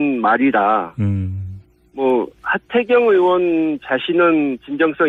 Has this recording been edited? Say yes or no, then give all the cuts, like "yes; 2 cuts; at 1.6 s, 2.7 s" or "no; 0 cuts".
no; 0 cuts